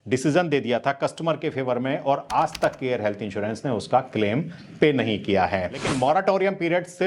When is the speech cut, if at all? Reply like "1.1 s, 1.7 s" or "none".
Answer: 5.9 s